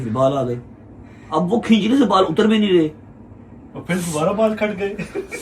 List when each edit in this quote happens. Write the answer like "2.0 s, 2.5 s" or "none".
none